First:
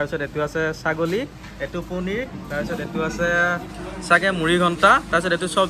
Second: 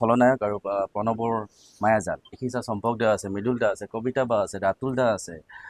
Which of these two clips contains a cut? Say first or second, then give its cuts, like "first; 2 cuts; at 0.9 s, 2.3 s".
second; 1 cut; at 2.4 s